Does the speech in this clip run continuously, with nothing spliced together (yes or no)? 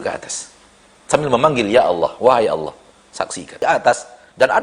no